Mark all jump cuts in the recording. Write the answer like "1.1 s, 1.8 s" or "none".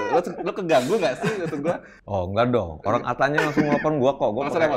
1.9 s